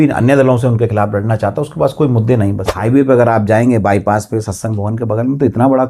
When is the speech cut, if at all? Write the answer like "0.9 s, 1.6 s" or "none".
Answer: 2.7 s